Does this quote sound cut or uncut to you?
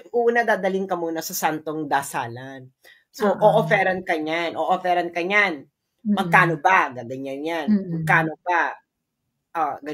uncut